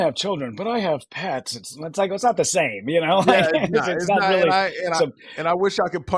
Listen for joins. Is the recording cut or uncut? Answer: uncut